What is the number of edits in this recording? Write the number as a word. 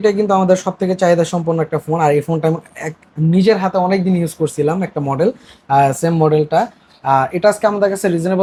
zero